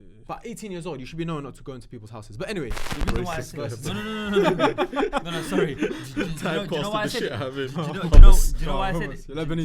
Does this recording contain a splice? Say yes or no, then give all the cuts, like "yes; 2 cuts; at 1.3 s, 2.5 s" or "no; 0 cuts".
yes; 1 cut; at 2.9 s